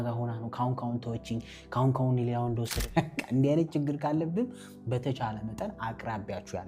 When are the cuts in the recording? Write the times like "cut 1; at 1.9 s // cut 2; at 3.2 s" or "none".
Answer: cut 1; at 2.8 s